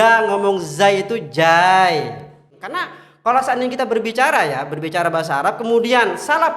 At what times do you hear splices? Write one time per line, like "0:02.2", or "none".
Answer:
0:02.6